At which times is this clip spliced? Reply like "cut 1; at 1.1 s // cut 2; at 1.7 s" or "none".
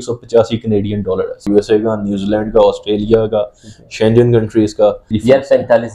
cut 1; at 1.4 s // cut 2; at 5.1 s